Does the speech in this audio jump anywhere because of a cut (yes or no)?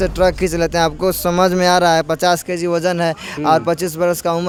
no